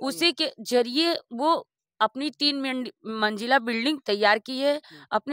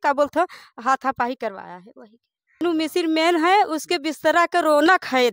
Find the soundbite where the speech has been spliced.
second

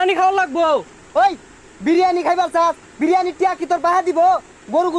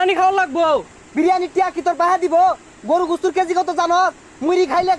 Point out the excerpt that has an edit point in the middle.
second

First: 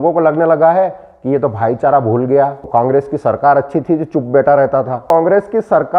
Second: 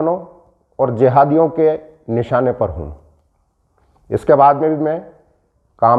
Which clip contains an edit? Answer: first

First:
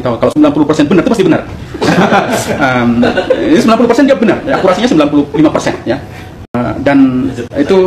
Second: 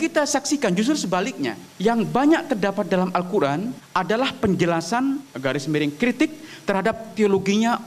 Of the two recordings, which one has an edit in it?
second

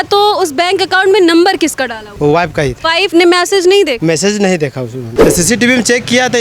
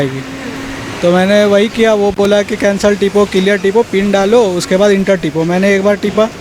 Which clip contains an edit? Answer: first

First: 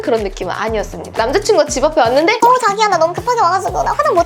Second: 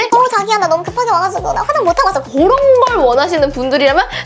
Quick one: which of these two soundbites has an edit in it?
first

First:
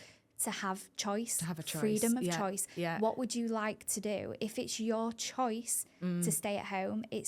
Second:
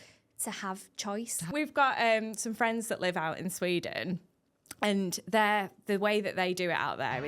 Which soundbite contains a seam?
second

